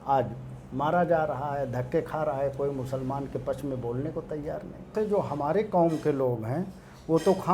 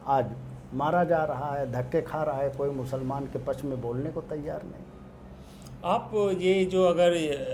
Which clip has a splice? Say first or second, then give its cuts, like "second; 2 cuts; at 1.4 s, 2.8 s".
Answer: first; 1 cut; at 4.9 s